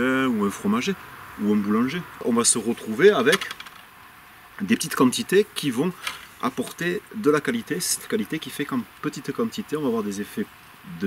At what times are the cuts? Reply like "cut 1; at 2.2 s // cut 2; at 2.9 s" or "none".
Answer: cut 1; at 2.1 s